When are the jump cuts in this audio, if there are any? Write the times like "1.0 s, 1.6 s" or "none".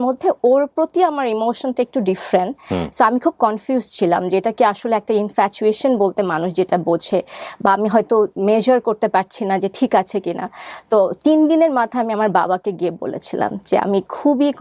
none